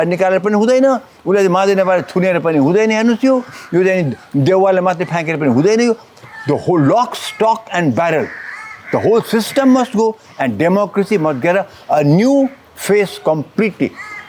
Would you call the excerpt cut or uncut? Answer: uncut